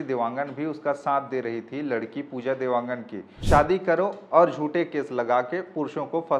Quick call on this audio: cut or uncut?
cut